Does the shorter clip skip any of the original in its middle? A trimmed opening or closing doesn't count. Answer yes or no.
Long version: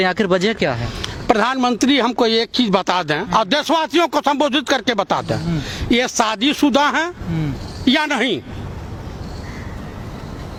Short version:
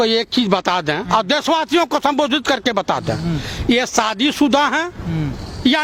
no